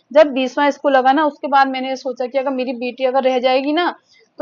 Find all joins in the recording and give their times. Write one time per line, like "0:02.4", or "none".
none